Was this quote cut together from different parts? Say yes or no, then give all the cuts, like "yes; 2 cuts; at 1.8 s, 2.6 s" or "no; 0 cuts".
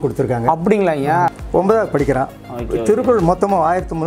yes; 1 cut; at 1.3 s